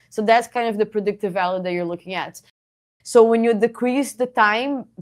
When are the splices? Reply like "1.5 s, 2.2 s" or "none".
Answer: 2.5 s